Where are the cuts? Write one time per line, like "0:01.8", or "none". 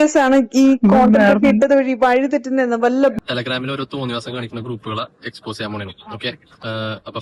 0:03.2